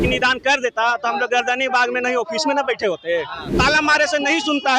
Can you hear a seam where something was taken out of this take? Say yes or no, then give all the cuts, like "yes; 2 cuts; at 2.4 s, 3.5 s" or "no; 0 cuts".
yes; 1 cut; at 3.5 s